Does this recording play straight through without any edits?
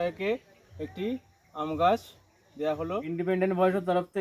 no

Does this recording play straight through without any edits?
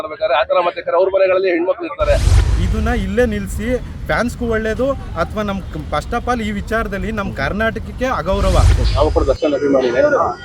no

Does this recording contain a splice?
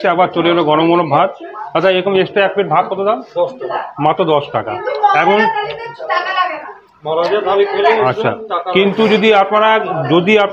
no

